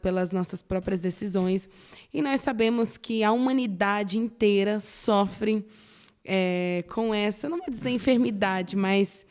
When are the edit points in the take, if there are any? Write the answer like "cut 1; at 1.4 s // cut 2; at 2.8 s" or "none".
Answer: none